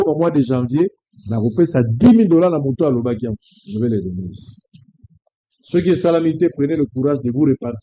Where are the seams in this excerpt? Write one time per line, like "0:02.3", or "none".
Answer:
none